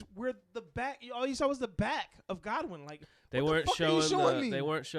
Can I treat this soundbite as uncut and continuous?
yes; 0 cuts

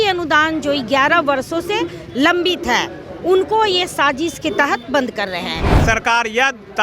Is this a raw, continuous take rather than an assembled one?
no; 1 cut; at 5.8 s

